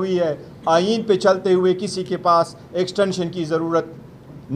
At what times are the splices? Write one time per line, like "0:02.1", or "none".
none